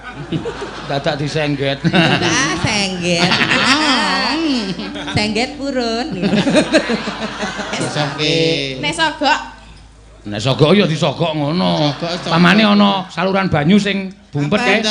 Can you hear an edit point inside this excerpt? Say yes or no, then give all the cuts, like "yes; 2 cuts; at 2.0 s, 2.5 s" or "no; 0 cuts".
yes; 1 cut; at 7.8 s